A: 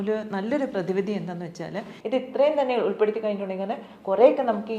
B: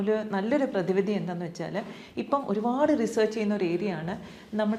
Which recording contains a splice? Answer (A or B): A